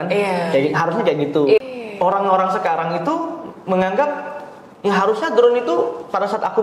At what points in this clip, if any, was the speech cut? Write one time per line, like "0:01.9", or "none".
0:01.6